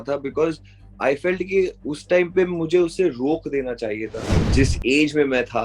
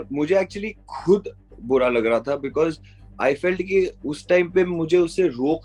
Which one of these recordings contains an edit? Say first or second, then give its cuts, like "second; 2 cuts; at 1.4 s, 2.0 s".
first; 1 cut; at 4.5 s